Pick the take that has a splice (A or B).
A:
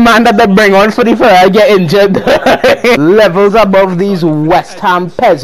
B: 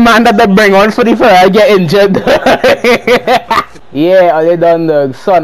A